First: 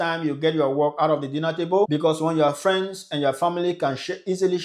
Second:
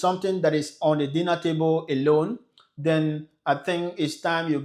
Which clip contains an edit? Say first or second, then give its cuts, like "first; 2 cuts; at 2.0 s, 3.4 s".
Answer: first; 1 cut; at 1.9 s